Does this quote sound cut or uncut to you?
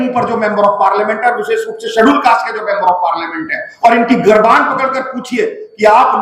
uncut